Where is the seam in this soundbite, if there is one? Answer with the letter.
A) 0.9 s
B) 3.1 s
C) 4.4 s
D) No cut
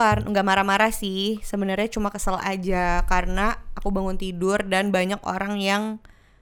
D